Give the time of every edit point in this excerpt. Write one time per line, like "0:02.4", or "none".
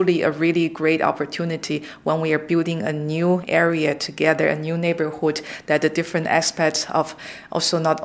none